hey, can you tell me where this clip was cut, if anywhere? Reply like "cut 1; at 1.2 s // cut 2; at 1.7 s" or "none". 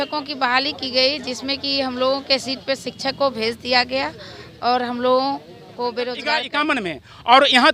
cut 1; at 6.5 s